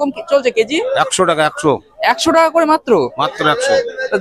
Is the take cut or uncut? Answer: uncut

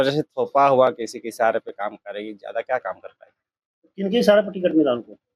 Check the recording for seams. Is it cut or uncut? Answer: uncut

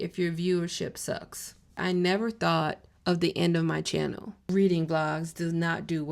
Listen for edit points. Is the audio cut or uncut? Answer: cut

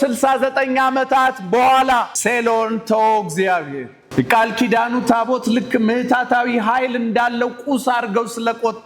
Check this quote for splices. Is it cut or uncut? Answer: cut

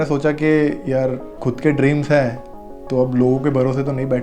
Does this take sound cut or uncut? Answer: cut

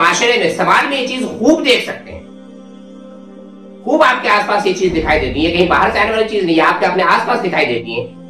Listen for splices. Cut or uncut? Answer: uncut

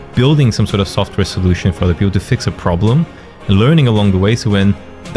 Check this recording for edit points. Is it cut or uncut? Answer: uncut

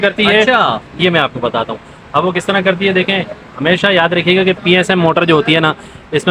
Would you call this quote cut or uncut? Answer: uncut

